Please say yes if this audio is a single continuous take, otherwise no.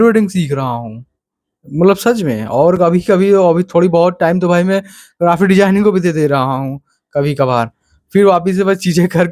yes